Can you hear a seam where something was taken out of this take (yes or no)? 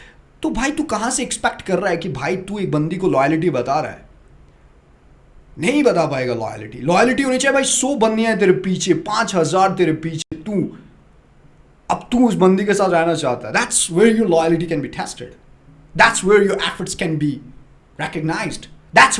no